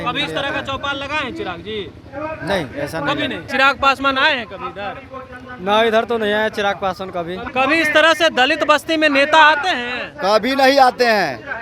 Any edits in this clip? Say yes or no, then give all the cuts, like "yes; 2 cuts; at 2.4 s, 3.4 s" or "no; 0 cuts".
yes; 2 cuts; at 3.5 s, 7.4 s